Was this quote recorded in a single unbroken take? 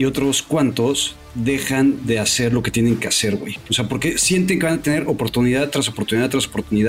yes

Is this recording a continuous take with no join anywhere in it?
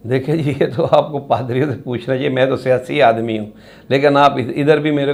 yes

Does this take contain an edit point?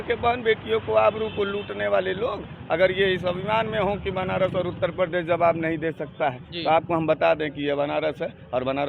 no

